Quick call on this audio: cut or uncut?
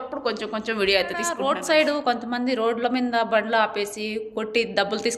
cut